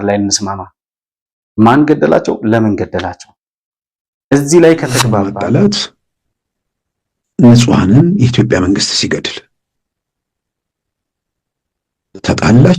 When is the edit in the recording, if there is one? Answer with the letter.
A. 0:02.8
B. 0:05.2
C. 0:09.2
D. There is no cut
B